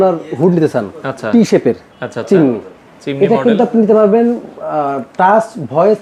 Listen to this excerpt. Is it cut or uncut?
uncut